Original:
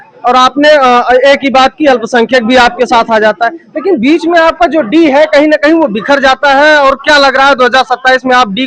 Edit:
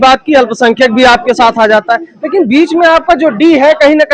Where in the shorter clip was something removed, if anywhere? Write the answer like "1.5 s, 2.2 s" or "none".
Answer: none